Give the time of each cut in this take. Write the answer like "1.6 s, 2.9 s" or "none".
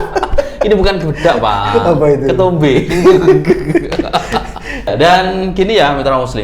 4.9 s

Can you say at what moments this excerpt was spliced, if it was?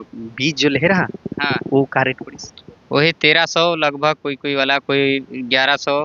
none

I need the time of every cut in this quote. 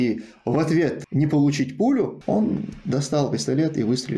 1.0 s, 2.2 s

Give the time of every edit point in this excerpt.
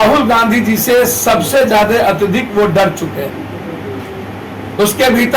none

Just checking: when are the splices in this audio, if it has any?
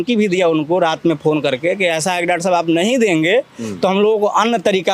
none

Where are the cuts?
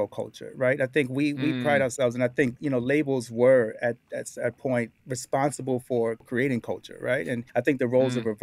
5.0 s, 6.3 s, 7.4 s

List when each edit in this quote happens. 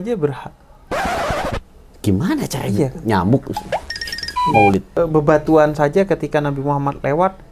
5.0 s

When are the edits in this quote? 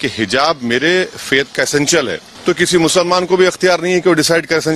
2.3 s

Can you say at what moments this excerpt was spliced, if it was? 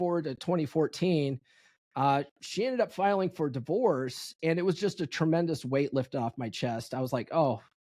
none

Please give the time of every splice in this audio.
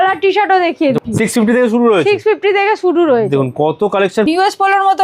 1.0 s, 4.3 s

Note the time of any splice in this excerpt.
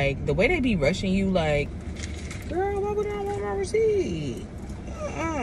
1.7 s

